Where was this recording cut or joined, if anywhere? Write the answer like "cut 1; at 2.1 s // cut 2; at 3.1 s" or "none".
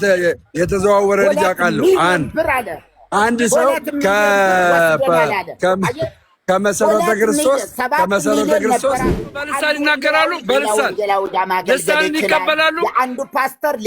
cut 1; at 9.3 s